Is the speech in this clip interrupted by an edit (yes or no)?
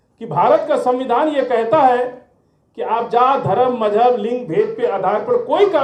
no